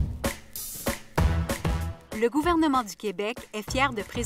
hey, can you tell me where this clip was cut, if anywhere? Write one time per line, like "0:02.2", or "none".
0:01.9